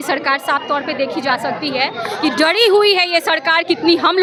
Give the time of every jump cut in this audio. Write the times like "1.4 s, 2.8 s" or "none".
none